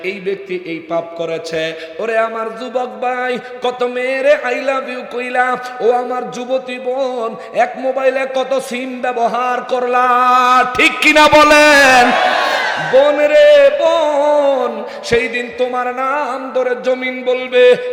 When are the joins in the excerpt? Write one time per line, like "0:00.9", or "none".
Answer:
none